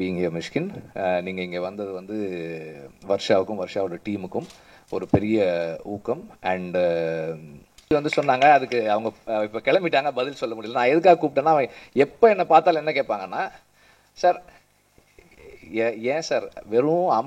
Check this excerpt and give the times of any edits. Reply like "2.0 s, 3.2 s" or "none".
7.9 s